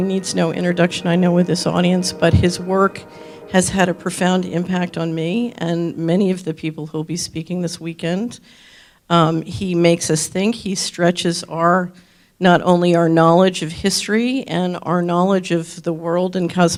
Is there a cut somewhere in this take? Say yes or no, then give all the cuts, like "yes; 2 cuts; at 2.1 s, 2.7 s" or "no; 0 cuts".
no; 0 cuts